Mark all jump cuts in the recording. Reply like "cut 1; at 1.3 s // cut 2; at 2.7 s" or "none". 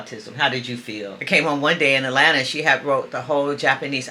cut 1; at 1.3 s